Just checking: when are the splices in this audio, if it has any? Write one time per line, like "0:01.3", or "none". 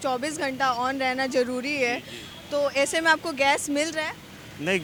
none